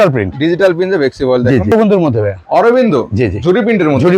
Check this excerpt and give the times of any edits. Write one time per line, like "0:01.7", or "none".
0:01.7